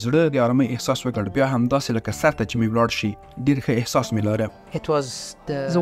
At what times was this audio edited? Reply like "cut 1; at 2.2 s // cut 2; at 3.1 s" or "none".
cut 1; at 4.7 s